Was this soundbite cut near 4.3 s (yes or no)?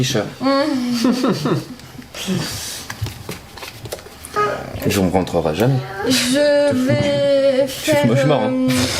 yes